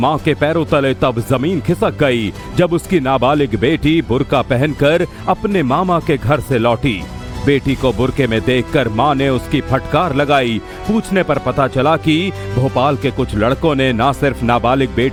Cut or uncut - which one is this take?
uncut